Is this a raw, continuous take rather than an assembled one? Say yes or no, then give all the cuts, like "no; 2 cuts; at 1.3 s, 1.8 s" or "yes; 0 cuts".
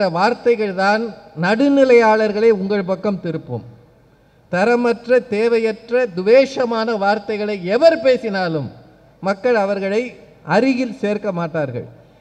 yes; 0 cuts